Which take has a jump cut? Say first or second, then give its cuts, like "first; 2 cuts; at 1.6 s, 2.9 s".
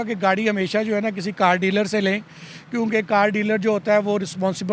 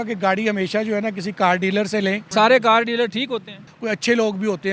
second; 2 cuts; at 2.2 s, 3.7 s